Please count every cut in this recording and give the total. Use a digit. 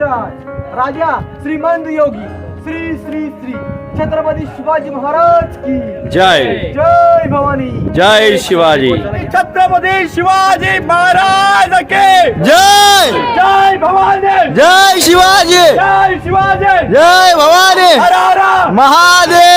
1